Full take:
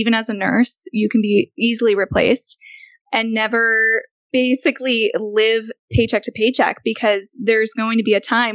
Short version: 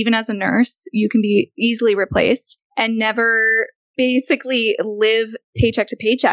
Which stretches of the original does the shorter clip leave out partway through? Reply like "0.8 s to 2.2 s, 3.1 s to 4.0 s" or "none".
2.6 s to 2.9 s